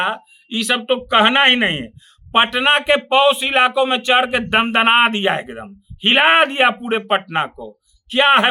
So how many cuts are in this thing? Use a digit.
0